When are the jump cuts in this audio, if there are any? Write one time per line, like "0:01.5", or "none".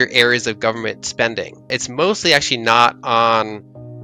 0:01.8